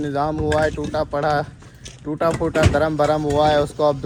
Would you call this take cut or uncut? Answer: uncut